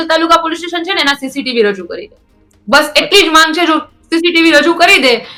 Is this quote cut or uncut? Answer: uncut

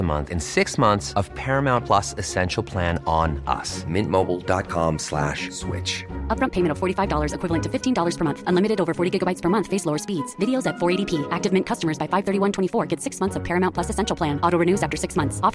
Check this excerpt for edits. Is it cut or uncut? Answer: uncut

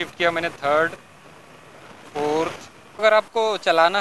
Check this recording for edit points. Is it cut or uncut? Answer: cut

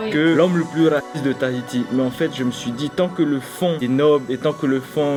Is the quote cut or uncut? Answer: uncut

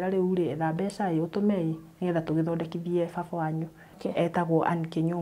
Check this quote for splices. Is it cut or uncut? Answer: cut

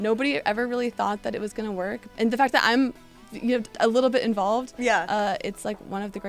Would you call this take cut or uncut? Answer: cut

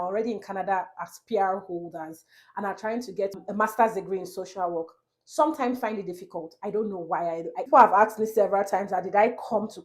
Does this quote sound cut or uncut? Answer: cut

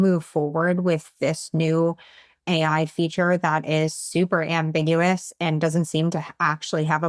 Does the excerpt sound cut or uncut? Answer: uncut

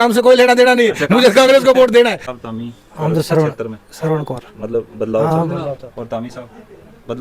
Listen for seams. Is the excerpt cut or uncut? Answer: cut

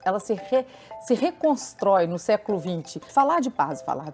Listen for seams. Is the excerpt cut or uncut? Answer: cut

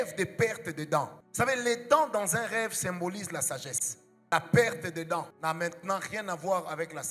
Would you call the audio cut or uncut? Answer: cut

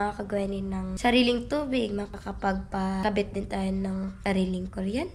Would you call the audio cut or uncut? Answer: cut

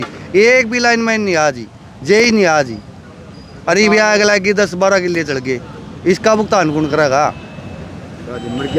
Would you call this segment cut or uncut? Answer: uncut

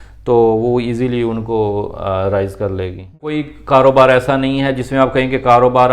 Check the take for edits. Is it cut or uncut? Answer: cut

